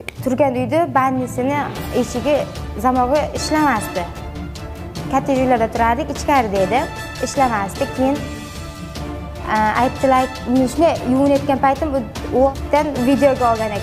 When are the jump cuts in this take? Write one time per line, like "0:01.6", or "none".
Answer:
0:12.5